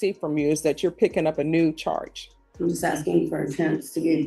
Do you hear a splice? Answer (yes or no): yes